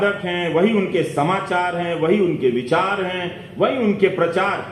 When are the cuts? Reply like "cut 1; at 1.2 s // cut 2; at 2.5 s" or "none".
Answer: none